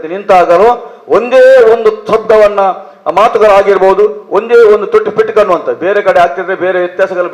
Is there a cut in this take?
no; 0 cuts

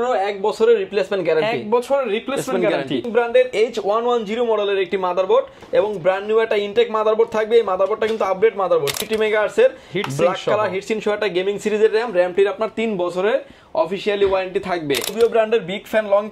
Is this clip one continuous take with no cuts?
no; 3 cuts; at 3.1 s, 9.0 s, 15.1 s

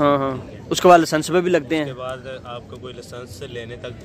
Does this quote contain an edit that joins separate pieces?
no; 0 cuts

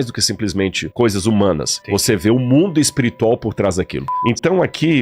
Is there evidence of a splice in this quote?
yes; 2 cuts; at 1.7 s, 4.1 s

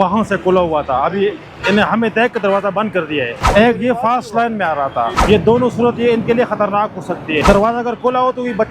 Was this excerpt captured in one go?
no; 3 cuts; at 3.4 s, 5.2 s, 7.4 s

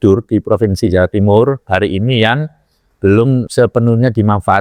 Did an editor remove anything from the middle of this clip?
yes; 1 cut; at 3.5 s

